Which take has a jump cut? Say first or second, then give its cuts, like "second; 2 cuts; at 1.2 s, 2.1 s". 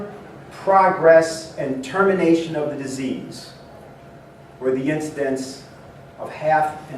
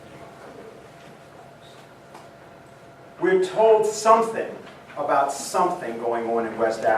second; 1 cut; at 5.9 s